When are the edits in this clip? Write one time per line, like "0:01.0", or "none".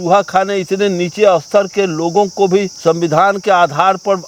none